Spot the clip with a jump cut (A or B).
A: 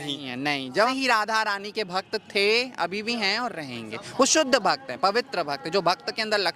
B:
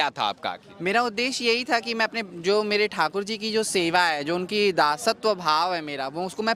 A